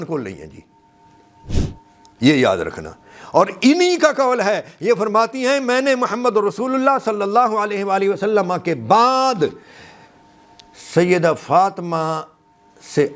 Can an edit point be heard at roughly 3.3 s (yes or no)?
no